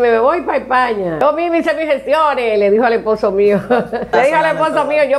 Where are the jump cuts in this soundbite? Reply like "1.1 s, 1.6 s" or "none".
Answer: 1.2 s, 4.1 s